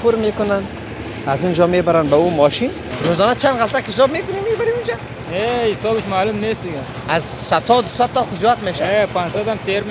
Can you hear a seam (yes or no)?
yes